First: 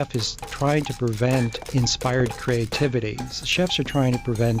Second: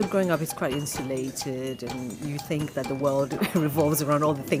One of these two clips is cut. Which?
first; 1 cut; at 1.6 s

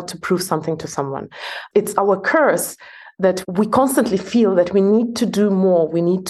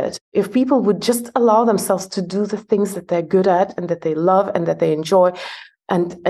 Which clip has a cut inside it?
first; 2 cuts; at 1.6 s, 3.4 s

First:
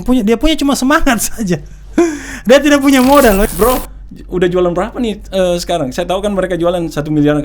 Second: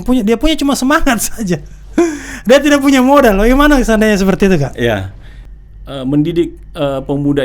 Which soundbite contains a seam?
first; 1 cut; at 3.4 s

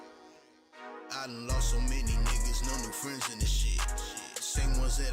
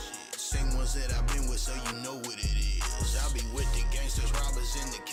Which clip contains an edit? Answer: first; 1 cut; at 1.0 s

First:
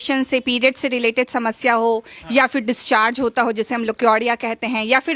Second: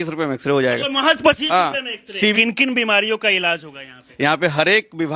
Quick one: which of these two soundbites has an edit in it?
second; 2 cuts; at 1.9 s, 4.0 s

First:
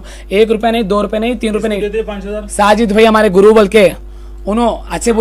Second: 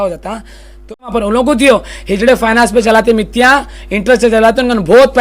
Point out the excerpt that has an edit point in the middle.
second; 1 cut; at 1.1 s

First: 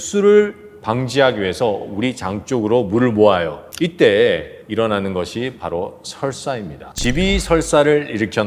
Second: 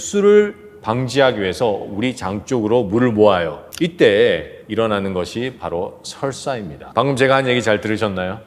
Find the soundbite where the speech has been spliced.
first; 1 cut; at 6.8 s

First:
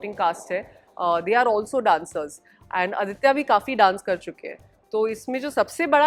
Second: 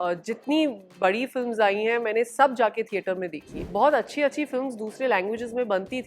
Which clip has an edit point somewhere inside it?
second; 1 cut; at 3.6 s

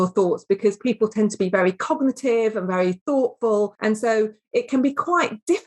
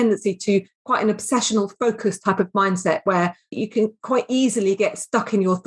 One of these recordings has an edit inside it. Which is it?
first; 1 cut; at 3.8 s

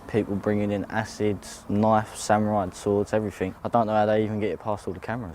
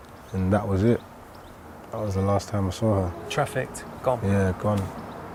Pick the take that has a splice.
first; 2 cuts; at 1.5 s, 3.5 s

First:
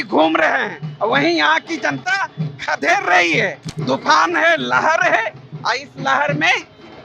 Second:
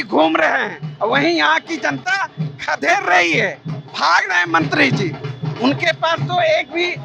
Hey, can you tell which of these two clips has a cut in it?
first; 1 cut; at 3.7 s

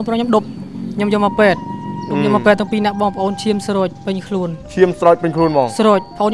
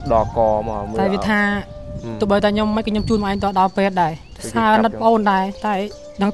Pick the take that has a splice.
second; 1 cut; at 4.3 s

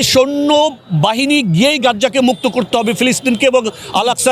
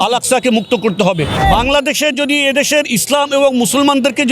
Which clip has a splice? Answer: second; 1 cut; at 1.4 s

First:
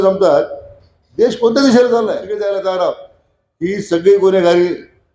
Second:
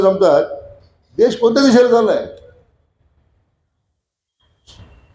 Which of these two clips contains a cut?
first; 1 cut; at 2.3 s

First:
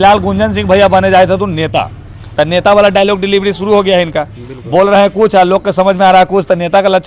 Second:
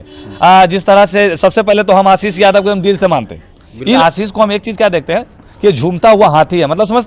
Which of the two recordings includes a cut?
second; 1 cut; at 4.0 s

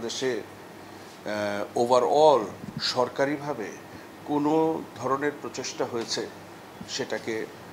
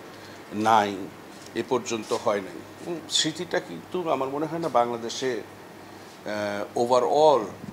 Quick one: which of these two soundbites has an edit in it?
second; 1 cut; at 3.1 s

